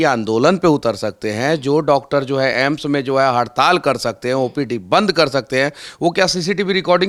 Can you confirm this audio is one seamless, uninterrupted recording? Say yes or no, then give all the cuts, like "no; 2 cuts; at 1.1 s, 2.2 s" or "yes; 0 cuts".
yes; 0 cuts